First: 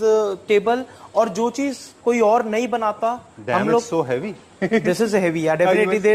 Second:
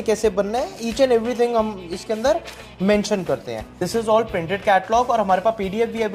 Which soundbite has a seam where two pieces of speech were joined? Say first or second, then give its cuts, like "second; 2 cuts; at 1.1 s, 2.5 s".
second; 1 cut; at 3.7 s